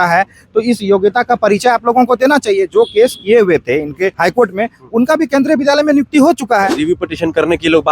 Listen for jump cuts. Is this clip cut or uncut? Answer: cut